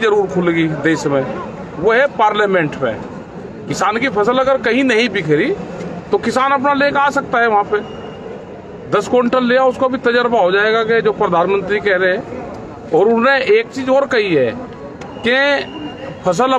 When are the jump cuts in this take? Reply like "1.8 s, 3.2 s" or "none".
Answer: none